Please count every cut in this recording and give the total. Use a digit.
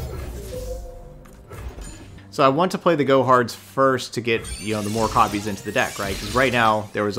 1